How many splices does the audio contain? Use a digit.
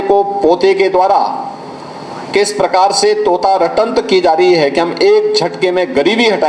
0